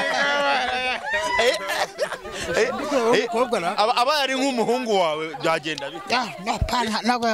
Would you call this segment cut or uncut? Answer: uncut